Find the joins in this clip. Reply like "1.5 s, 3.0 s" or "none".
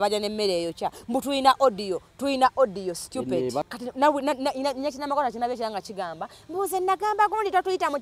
3.7 s

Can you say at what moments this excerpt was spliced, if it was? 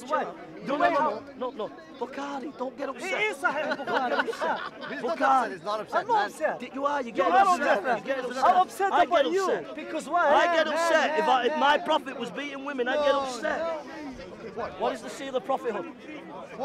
13.8 s

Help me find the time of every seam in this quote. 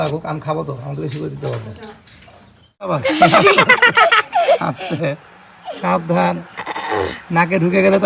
3.0 s

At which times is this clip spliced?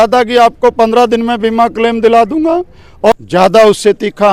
3.1 s

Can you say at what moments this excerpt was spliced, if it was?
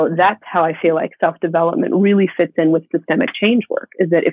none

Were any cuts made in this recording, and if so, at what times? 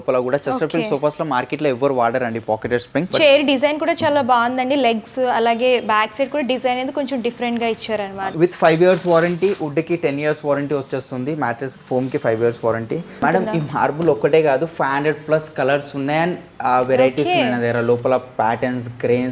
3.1 s, 8.2 s, 13.2 s

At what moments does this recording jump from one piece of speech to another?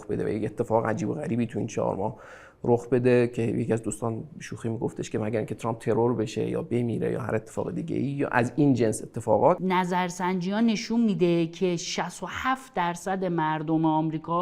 9.6 s

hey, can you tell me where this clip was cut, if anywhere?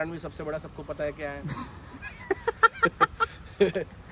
none

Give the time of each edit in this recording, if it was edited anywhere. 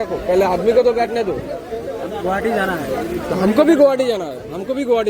none

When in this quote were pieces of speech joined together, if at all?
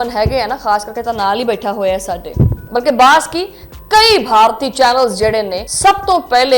2.6 s, 5.6 s

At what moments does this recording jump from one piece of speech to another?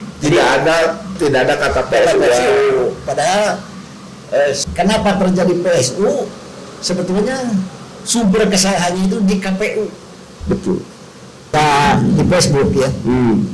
4.6 s, 11.5 s

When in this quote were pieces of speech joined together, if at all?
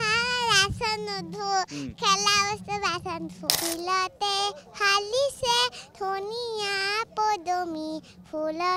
3.5 s

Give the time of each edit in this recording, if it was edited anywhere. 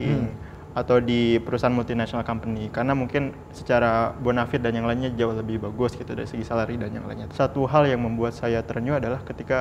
7.2 s

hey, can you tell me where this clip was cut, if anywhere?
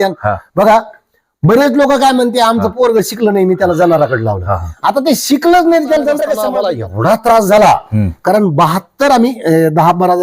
6.4 s

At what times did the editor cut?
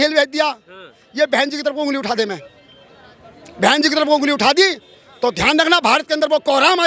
none

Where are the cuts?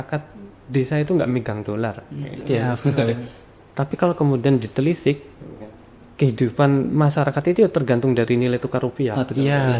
none

